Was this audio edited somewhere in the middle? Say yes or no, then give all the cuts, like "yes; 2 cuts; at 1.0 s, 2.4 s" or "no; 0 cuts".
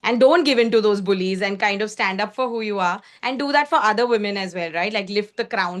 no; 0 cuts